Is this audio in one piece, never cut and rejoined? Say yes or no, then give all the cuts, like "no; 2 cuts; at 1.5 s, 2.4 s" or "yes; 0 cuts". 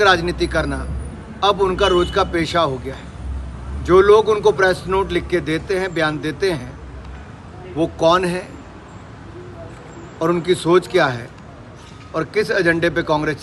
yes; 0 cuts